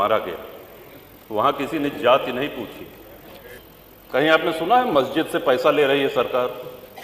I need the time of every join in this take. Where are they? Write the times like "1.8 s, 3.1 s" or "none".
3.6 s

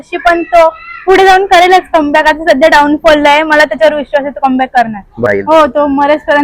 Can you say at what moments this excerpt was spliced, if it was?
5.3 s

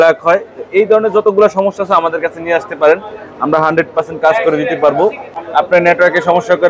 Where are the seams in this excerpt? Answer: 5.4 s

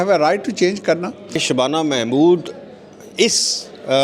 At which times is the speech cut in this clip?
1.4 s

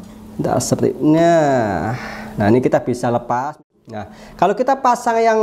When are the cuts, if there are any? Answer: 3.6 s

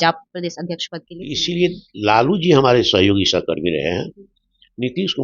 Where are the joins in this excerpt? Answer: 1.4 s

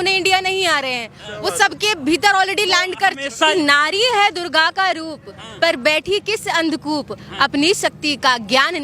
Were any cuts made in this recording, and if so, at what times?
3.5 s

